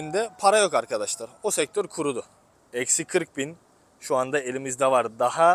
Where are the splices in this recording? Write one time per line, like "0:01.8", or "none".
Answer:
0:02.5